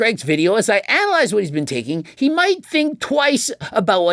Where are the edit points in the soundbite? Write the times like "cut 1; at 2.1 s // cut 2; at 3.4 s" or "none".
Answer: none